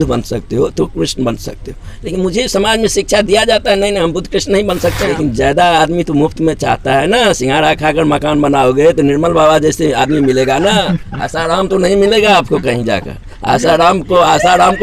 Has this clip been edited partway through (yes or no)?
yes